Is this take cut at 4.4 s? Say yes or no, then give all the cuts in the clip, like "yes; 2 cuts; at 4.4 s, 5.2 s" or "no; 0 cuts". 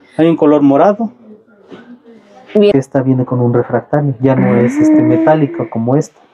no; 1 cut; at 2.7 s